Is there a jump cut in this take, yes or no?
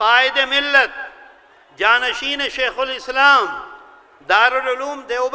no